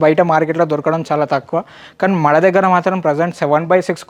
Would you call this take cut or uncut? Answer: uncut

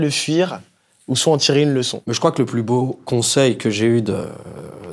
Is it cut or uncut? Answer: cut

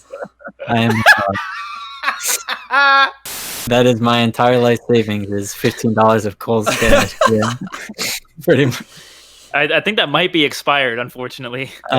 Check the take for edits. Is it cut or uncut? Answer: cut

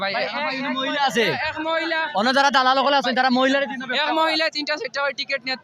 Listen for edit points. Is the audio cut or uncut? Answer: uncut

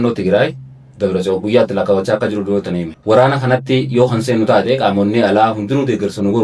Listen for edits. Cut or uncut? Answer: cut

